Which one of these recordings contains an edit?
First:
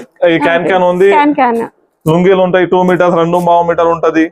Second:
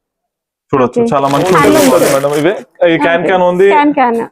second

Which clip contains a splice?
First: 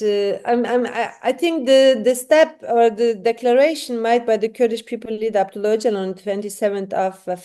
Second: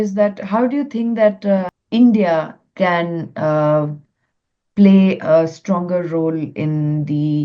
second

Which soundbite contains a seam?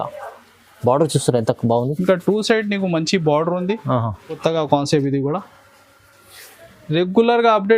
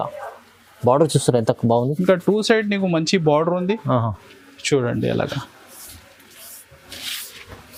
first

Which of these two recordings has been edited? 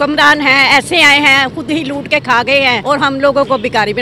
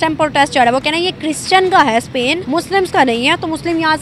first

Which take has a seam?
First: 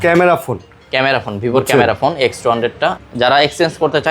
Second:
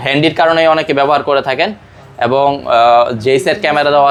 first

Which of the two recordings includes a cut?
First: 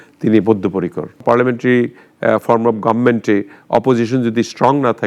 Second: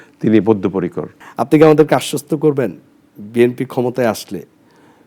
first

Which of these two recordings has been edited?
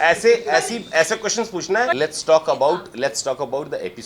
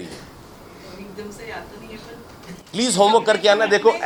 first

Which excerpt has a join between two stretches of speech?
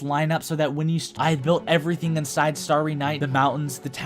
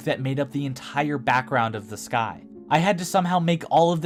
first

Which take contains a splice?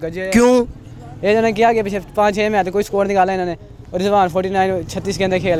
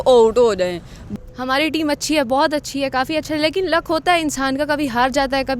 second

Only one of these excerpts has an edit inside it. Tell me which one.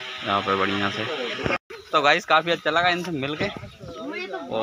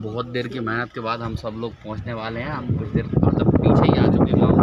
first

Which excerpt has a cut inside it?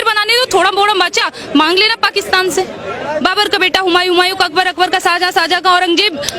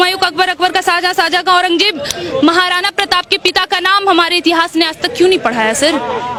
first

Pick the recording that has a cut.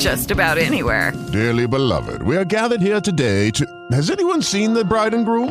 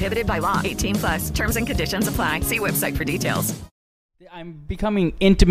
second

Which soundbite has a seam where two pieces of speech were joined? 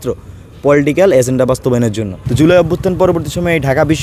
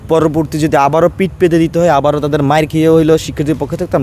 first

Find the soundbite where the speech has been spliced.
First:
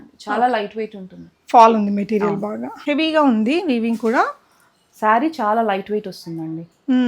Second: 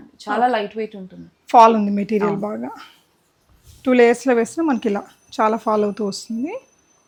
first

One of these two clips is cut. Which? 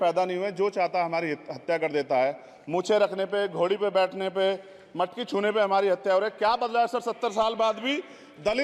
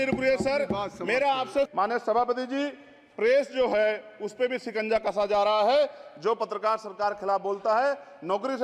second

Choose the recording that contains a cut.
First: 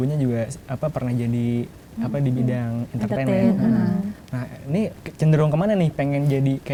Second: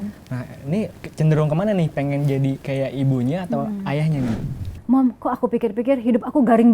second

